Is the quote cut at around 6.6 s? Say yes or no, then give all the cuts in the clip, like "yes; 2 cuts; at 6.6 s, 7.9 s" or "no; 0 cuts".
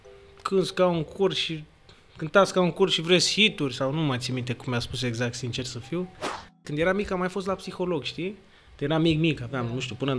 yes; 1 cut; at 6.6 s